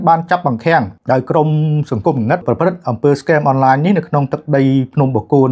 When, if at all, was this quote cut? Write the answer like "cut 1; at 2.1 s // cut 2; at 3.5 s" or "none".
cut 1; at 1.0 s // cut 2; at 2.4 s